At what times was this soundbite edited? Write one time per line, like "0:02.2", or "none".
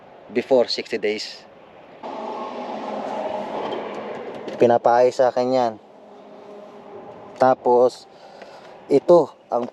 0:02.0